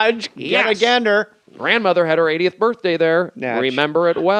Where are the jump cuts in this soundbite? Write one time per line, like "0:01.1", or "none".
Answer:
none